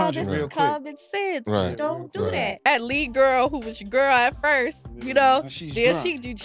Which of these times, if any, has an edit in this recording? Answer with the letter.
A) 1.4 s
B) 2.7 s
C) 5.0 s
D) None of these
B